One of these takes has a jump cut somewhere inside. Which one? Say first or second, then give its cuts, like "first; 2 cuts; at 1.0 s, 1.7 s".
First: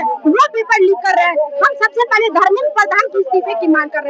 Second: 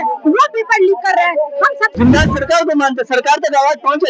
second; 1 cut; at 1.8 s